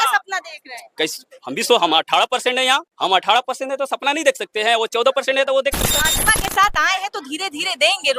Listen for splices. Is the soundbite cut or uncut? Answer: cut